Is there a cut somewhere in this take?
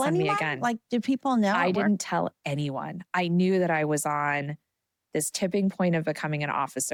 no; 0 cuts

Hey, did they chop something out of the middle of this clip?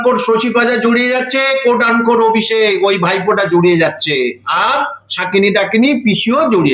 no; 0 cuts

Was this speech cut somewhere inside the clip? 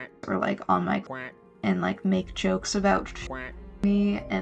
no; 0 cuts

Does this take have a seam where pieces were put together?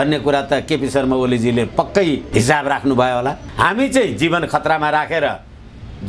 yes; 2 cuts; at 2.2 s, 3.4 s

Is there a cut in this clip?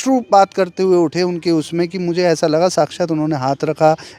no; 0 cuts

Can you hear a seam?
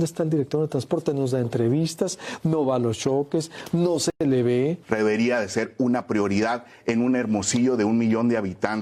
yes; 1 cut; at 4.8 s

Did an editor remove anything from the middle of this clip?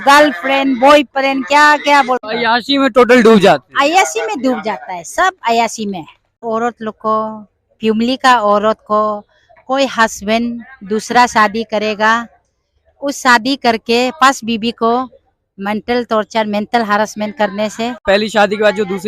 yes; 3 cuts; at 2.3 s, 6.4 s, 18.0 s

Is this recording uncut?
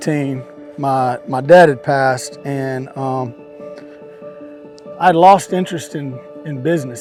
yes; 0 cuts

